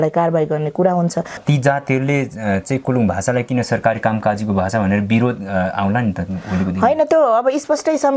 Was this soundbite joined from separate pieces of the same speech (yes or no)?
yes